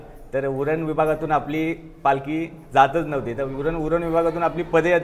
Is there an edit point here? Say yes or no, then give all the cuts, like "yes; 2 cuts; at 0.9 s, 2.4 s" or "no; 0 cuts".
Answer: no; 0 cuts